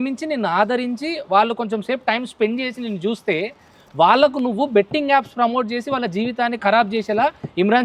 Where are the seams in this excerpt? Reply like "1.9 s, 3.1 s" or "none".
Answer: none